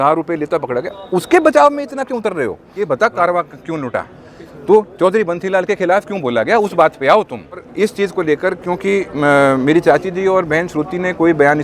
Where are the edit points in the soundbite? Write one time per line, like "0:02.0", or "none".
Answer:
0:02.7
0:07.6